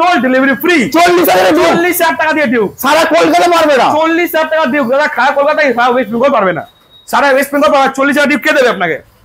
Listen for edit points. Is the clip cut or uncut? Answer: uncut